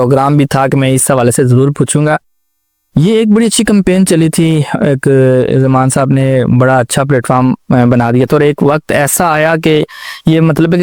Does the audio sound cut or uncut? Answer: uncut